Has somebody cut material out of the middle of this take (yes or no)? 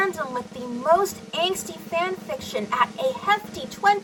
no